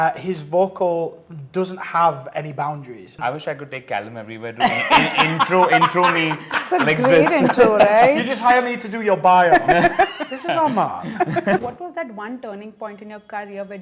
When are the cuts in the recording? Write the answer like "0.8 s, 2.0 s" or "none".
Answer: 3.1 s, 11.6 s